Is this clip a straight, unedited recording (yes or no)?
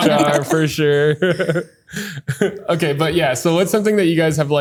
yes